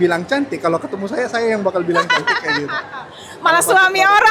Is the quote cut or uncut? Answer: uncut